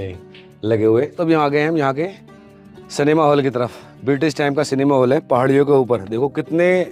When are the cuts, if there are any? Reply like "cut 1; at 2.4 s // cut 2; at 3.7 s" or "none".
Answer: cut 1; at 1.1 s